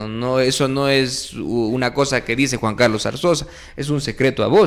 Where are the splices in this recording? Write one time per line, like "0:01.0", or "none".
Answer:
none

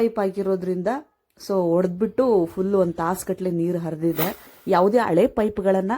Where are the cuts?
0:04.5

